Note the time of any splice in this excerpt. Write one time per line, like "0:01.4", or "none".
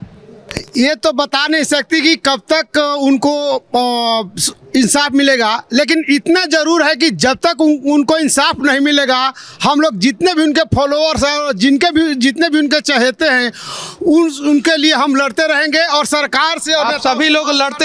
none